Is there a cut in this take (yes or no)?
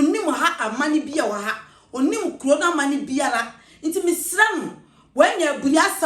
no